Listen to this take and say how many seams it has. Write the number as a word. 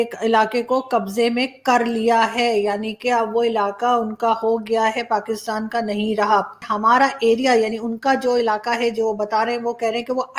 one